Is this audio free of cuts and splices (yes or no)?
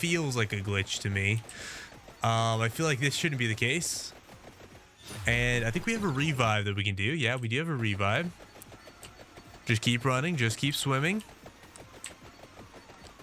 yes